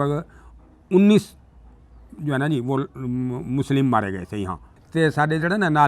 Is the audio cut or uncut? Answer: cut